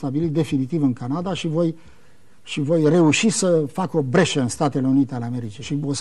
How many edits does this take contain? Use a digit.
1